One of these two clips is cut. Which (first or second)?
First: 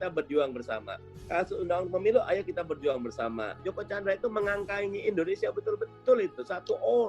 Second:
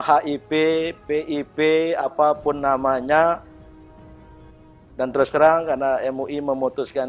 first